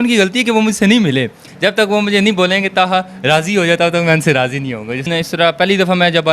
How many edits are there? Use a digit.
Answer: 2